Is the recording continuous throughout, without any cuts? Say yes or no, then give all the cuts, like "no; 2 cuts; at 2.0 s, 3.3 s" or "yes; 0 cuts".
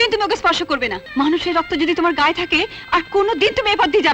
no; 1 cut; at 1.0 s